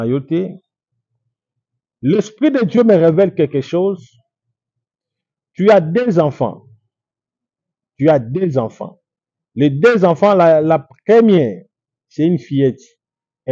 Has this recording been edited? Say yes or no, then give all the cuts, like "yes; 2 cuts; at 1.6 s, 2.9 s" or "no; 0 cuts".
no; 0 cuts